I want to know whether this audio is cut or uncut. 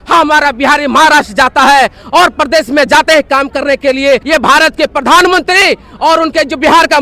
cut